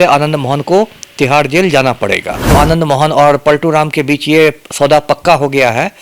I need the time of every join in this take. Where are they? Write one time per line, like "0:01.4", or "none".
0:02.5